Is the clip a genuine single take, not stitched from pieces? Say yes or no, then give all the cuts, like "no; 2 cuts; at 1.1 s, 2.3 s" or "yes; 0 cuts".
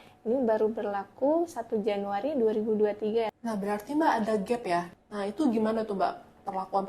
no; 2 cuts; at 3.4 s, 5.0 s